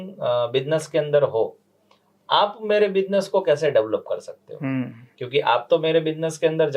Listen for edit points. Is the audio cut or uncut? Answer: uncut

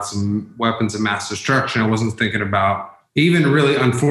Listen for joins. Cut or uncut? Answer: cut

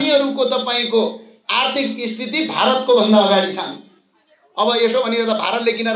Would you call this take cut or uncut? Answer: uncut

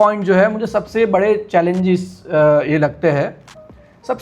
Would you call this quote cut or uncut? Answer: uncut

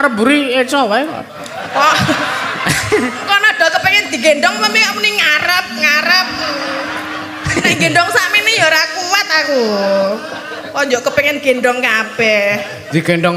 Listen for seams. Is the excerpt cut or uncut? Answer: uncut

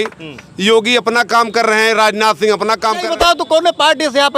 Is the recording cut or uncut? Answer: cut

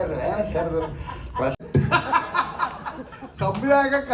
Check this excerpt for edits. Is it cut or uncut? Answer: cut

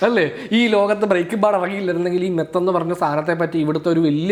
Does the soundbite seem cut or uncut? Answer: uncut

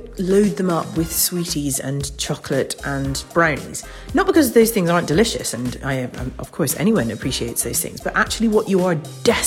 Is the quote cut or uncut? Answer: uncut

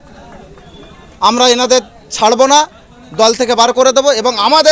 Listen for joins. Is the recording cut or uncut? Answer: uncut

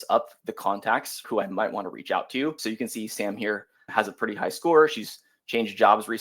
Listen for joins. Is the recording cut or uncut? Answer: cut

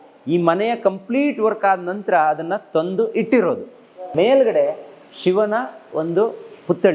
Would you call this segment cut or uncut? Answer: cut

